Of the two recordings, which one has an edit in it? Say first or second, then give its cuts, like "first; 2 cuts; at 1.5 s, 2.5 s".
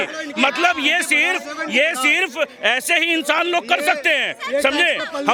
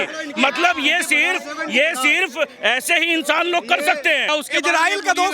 second; 1 cut; at 4.3 s